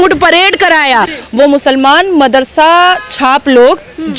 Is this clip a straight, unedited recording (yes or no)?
no